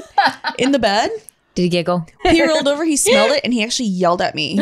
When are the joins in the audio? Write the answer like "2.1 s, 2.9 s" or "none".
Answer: 2.2 s

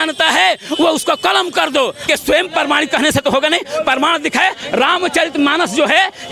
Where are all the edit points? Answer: 2.1 s

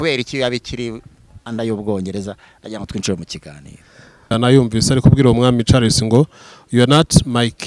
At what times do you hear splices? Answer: 4.3 s

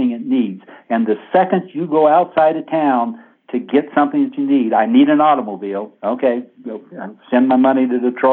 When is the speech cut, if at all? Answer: none

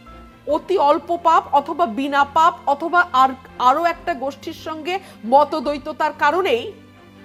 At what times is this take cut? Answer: none

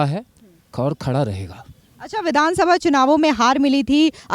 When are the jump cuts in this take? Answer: none

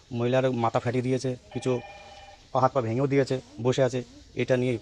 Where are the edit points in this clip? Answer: none

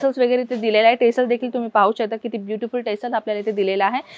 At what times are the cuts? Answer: none

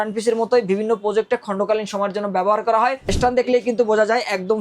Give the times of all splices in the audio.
3.1 s

